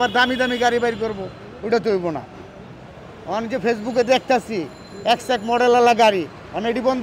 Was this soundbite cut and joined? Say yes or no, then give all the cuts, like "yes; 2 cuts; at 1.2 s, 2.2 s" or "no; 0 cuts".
no; 0 cuts